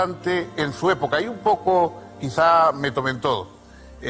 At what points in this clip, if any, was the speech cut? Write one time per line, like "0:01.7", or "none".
none